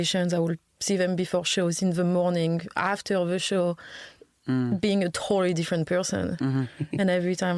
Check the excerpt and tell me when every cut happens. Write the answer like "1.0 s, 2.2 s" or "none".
none